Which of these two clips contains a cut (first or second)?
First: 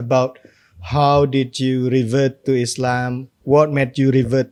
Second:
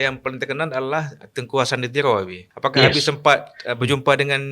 second